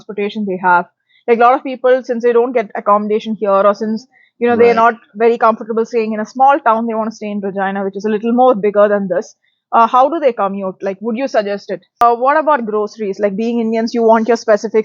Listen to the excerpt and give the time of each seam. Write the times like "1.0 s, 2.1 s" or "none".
12.0 s